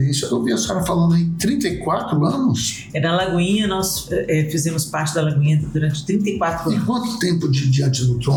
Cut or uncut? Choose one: uncut